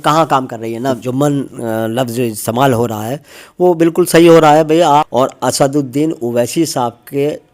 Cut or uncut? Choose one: cut